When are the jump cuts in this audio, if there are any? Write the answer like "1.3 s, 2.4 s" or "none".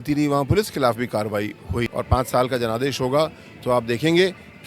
1.9 s